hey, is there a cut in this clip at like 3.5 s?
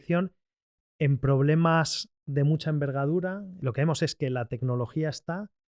yes; 1 cut; at 3.5 s

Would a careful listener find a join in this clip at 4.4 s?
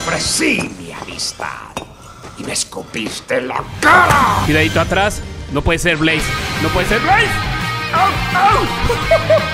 yes; 1 cut; at 4.4 s

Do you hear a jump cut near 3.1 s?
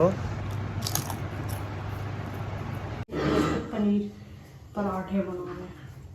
yes; 1 cut; at 3.1 s

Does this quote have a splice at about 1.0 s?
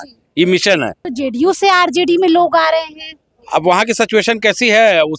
yes; 1 cut; at 1.0 s

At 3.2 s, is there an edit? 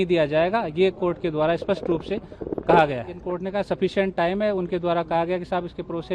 yes; 1 cut; at 3.2 s

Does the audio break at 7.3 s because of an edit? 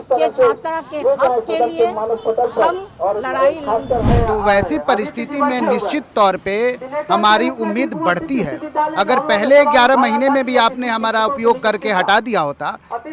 no; 1 cut; at 4.0 s

